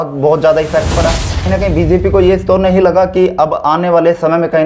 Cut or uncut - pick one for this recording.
cut